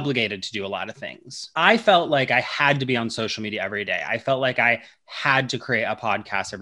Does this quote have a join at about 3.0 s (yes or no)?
no